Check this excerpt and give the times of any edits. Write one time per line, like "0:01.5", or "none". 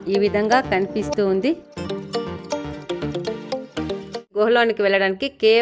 0:04.3